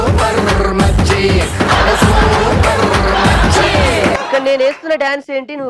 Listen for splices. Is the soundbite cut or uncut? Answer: uncut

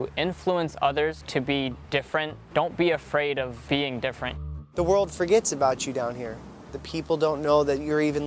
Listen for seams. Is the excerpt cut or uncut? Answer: cut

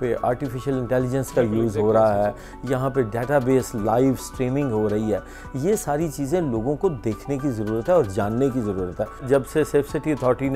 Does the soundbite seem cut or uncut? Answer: cut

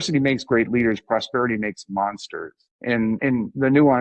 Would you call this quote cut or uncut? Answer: cut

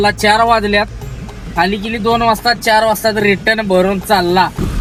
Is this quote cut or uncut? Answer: uncut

